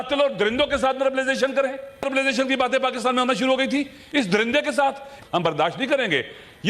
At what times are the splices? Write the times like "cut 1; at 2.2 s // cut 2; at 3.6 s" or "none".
cut 1; at 2.0 s // cut 2; at 5.1 s

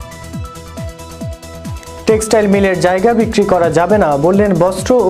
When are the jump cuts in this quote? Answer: cut 1; at 2.0 s

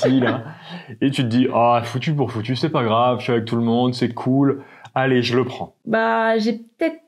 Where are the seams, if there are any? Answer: cut 1; at 5.7 s

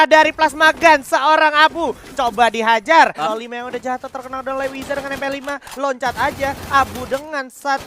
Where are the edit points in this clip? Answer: cut 1; at 3.2 s

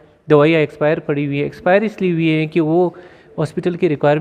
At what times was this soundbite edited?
none

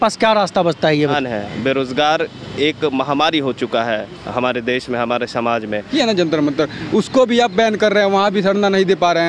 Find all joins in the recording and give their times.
cut 1; at 1.1 s // cut 2; at 5.9 s

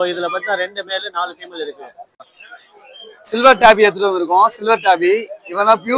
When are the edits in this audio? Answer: cut 1; at 2.3 s

